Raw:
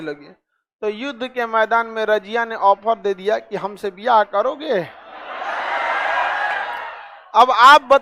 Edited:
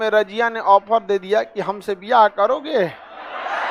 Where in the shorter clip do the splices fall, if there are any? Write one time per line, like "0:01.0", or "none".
none